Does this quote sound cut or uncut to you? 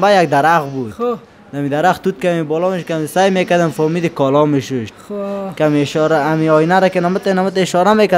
uncut